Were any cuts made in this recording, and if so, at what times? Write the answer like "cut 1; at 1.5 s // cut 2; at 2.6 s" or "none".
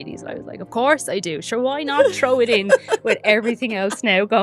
none